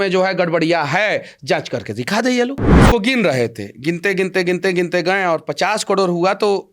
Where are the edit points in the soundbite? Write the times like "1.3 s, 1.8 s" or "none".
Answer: 2.7 s